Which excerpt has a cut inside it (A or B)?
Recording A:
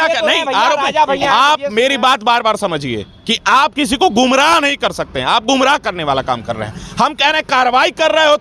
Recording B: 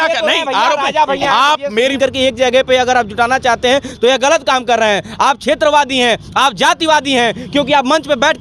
B